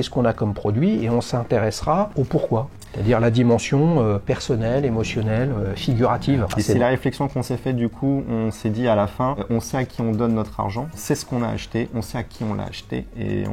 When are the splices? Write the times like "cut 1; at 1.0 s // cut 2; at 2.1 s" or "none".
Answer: cut 1; at 2.1 s // cut 2; at 4.2 s // cut 3; at 6.5 s // cut 4; at 9.4 s // cut 5; at 11.0 s